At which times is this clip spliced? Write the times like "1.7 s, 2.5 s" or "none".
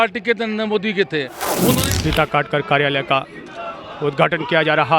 1.6 s